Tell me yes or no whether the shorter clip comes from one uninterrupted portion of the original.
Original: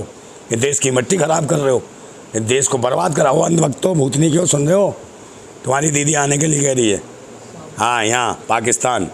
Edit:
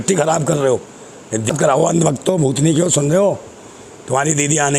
no